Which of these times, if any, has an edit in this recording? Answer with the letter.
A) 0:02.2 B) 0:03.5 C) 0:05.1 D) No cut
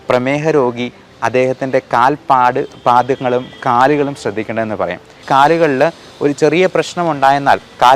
C